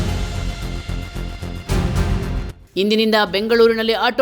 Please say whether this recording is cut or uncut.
cut